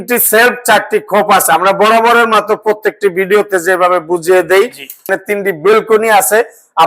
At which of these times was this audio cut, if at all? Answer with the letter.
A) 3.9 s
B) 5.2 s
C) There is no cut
B